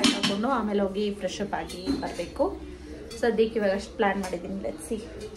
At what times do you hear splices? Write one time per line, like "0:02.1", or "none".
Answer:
none

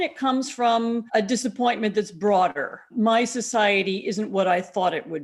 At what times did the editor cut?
0:01.0
0:02.8

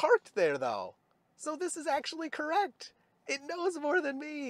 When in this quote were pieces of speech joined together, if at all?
none

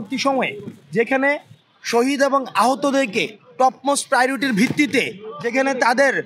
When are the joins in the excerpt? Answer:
none

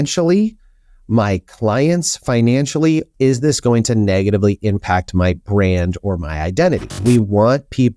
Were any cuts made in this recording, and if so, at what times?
0:03.1
0:06.9

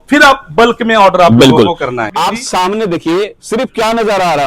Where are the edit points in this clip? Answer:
0:02.0

